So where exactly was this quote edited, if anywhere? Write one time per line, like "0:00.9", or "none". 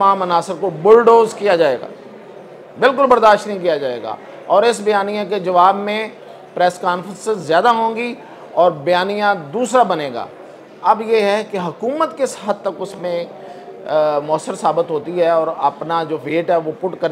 none